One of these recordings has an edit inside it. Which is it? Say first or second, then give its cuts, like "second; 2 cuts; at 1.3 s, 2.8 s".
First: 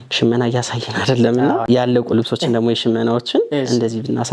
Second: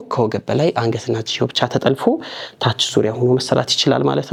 first; 1 cut; at 1.6 s